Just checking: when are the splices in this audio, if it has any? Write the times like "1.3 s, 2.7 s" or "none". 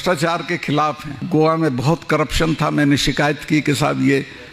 1.1 s